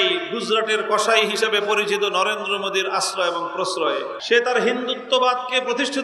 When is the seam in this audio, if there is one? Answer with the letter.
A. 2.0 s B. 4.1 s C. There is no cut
B